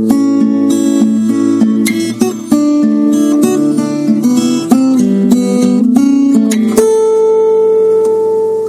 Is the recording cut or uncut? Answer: uncut